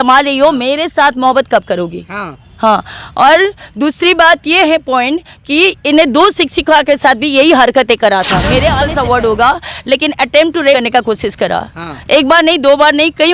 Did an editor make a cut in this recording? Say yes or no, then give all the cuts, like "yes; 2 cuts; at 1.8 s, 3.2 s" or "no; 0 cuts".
yes; 2 cuts; at 8.8 s, 10.7 s